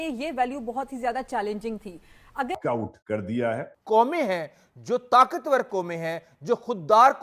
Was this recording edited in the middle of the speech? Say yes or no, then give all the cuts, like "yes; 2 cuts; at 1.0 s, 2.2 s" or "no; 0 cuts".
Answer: yes; 1 cut; at 2.6 s